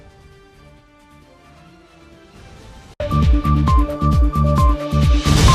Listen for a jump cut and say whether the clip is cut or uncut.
uncut